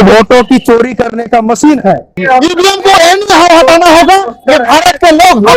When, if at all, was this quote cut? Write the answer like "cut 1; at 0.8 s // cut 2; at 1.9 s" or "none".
cut 1; at 2.1 s